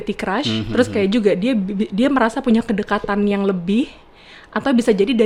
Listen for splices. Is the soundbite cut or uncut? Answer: uncut